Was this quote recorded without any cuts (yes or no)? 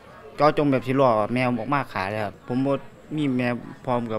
no